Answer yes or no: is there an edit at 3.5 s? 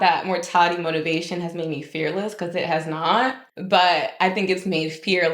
yes